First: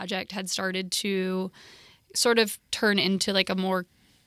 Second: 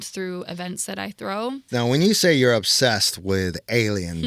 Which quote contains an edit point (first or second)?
second